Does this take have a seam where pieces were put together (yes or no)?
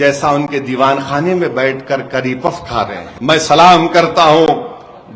yes